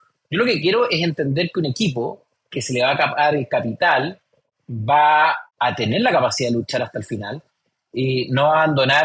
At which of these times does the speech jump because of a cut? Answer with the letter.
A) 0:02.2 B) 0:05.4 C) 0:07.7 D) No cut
B